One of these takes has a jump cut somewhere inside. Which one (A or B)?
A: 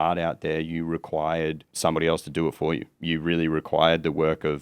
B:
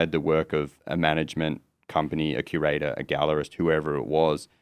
A